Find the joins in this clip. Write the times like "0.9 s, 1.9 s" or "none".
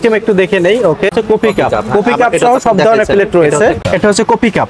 1.1 s, 3.8 s